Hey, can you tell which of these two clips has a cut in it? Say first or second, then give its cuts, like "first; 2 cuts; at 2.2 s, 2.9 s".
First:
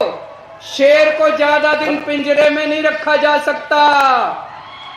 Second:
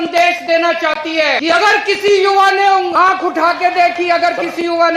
second; 2 cuts; at 1.4 s, 2.9 s